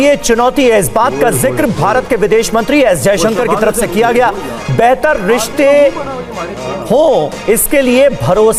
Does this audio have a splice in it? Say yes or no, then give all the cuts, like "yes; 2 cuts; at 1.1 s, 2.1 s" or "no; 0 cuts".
no; 0 cuts